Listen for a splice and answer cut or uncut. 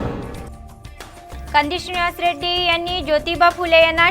cut